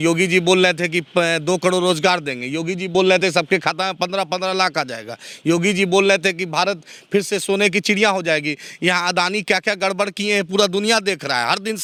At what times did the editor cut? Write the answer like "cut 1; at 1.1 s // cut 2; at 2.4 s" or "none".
none